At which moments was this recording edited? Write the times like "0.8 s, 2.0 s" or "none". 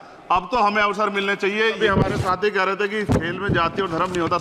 1.6 s